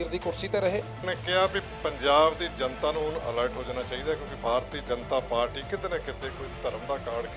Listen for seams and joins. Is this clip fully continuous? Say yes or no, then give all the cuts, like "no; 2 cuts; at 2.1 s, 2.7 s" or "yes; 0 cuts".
no; 1 cut; at 1.0 s